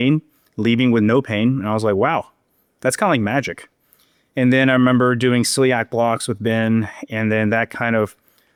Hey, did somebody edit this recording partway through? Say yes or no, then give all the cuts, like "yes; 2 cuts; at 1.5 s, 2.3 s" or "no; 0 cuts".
no; 0 cuts